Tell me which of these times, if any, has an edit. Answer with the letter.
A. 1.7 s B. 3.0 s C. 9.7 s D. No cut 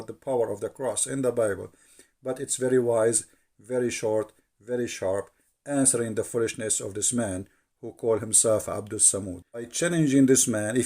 C